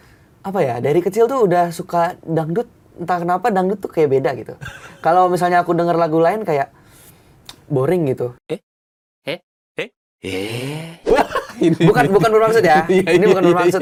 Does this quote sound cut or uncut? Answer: uncut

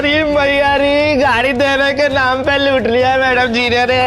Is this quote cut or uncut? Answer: uncut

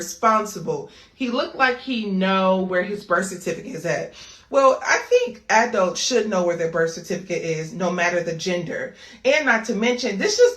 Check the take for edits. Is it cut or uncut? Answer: cut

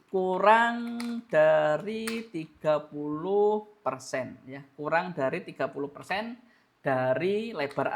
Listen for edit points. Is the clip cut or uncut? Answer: uncut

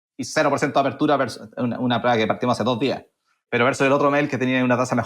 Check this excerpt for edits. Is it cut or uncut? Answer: uncut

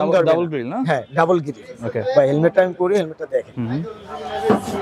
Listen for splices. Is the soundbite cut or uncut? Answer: uncut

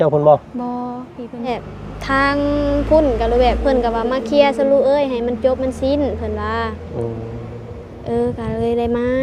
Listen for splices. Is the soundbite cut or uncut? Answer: cut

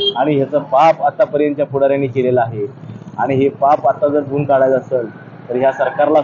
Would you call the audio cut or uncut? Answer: uncut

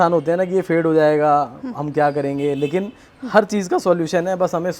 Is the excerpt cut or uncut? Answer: uncut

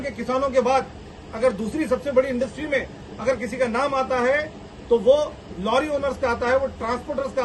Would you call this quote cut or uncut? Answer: uncut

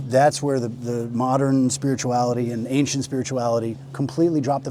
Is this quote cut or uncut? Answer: uncut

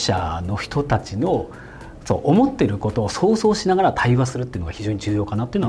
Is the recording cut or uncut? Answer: uncut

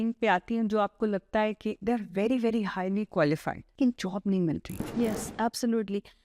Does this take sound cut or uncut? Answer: cut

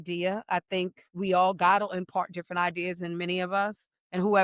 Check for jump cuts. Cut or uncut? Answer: uncut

